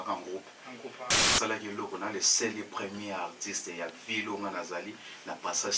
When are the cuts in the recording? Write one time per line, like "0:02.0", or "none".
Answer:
0:01.1

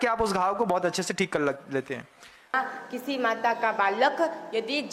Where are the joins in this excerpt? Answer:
0:02.4

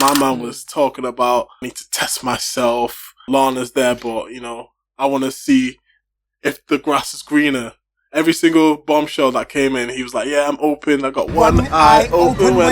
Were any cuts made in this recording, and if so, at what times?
0:01.8
0:03.2

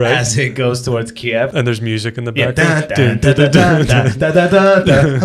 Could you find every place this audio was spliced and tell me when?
0:01.5

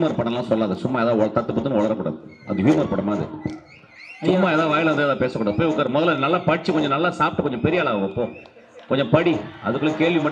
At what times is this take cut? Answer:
none

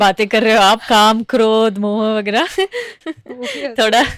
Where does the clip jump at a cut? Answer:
0:03.0

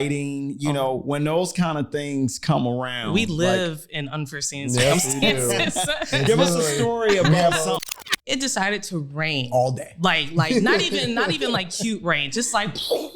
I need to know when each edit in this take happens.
0:07.8

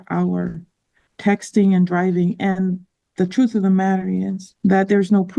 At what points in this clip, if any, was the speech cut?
0:04.4

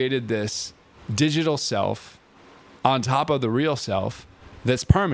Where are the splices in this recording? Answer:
none

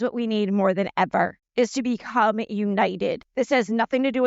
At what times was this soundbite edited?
0:01.4
0:03.2

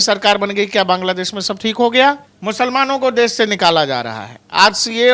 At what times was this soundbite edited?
0:02.3

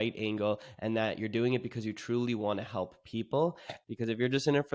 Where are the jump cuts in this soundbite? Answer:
0:03.8

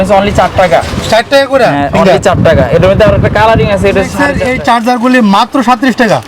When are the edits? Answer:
0:04.3

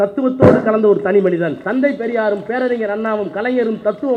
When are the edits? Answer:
0:01.6

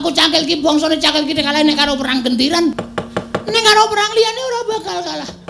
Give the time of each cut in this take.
0:02.8

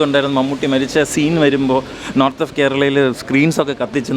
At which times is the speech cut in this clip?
none

